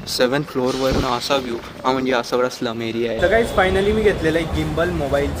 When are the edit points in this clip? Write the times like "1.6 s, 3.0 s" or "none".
3.2 s